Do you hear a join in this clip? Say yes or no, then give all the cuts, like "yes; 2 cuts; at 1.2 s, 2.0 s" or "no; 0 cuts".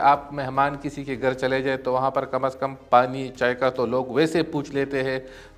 no; 0 cuts